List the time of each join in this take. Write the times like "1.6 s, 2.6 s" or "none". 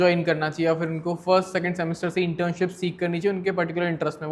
none